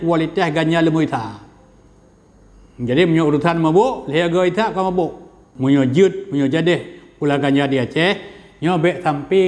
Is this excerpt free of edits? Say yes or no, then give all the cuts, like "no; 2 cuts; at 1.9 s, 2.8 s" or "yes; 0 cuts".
no; 1 cut; at 5.5 s